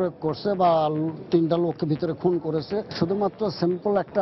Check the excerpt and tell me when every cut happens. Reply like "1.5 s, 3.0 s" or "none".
2.9 s

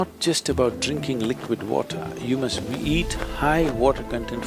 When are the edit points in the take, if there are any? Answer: none

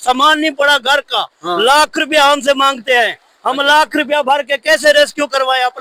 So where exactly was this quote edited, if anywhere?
none

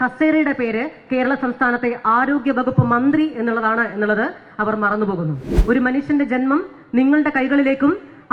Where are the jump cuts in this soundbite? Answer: 5.4 s

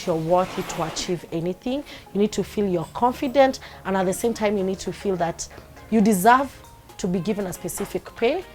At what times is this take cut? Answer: none

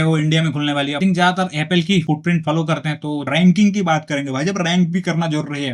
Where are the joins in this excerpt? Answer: 1.0 s, 2.0 s, 3.3 s

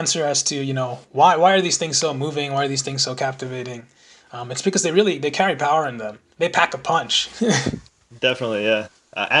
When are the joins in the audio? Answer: 6.2 s

